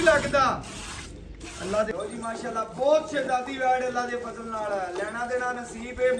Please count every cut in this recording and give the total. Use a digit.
1